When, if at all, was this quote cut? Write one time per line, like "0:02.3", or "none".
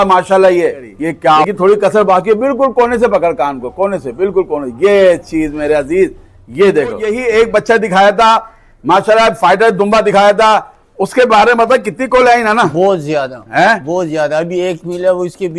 0:01.5
0:07.1